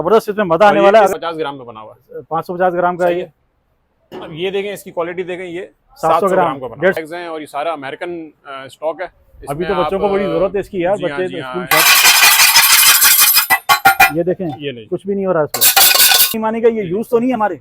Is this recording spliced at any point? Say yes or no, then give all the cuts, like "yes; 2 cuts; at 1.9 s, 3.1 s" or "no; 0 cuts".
yes; 4 cuts; at 1.1 s, 7.0 s, 11.7 s, 16.4 s